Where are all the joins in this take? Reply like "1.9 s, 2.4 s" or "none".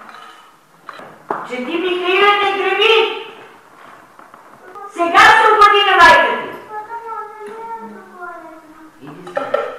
4.7 s